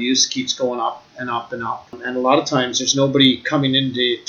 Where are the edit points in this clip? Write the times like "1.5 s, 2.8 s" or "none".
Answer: 2.0 s